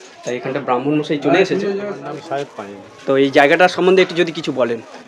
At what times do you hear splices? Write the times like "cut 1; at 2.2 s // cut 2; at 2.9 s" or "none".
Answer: cut 1; at 1.9 s